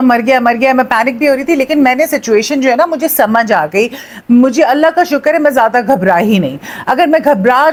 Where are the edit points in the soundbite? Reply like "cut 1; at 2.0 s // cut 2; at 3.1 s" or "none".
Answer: none